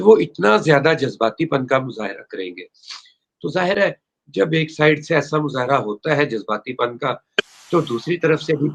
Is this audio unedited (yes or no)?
yes